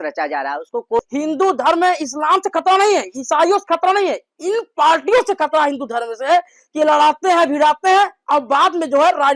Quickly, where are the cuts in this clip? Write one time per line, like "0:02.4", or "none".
0:01.0